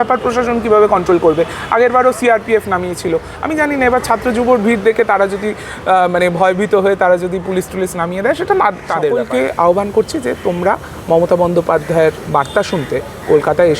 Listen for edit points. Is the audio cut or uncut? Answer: cut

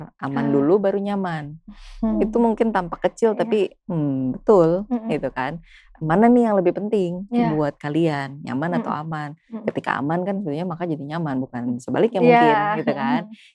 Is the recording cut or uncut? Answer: uncut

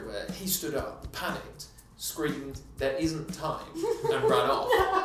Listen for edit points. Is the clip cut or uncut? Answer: uncut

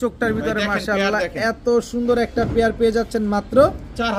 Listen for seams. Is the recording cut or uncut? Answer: uncut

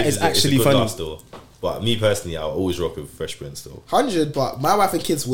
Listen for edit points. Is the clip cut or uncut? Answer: uncut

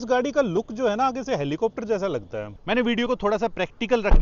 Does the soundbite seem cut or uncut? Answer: cut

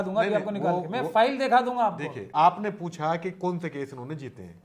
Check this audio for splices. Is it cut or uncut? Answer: cut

